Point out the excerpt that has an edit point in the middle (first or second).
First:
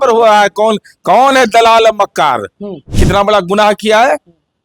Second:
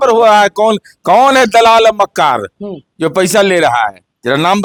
first